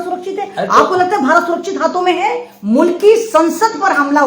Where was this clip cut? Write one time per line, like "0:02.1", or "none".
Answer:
0:02.5